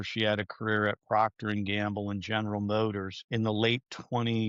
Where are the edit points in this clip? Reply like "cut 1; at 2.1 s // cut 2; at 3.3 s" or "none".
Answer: cut 1; at 3.1 s